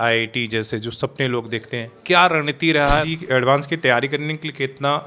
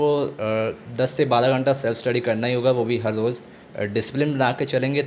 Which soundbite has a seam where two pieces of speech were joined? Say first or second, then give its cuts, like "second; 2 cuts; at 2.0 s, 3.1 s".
first; 1 cut; at 3.1 s